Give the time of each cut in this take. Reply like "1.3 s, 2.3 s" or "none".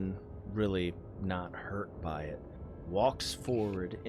2.8 s

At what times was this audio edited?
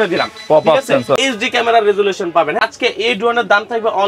1.2 s, 2.6 s

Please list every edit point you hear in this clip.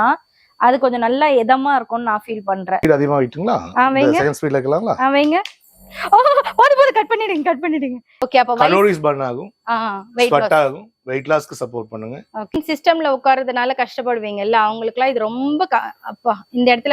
2.8 s, 8.3 s, 12.5 s

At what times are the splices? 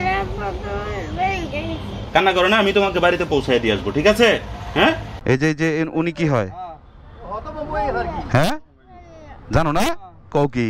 1.9 s, 5.1 s

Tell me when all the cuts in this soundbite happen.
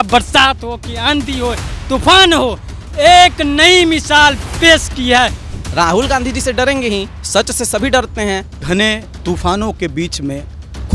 5.4 s, 7.2 s, 8.6 s

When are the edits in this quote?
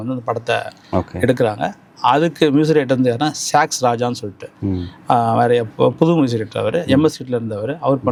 none

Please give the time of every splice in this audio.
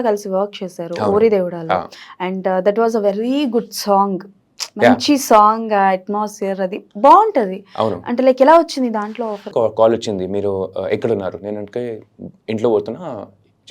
9.5 s

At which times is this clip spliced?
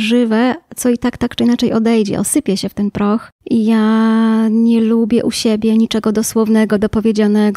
3.3 s

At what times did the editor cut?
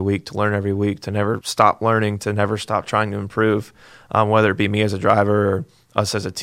1.5 s

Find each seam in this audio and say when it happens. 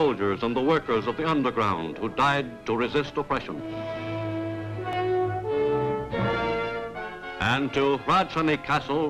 none

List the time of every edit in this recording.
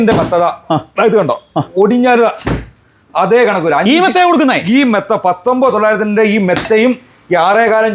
none

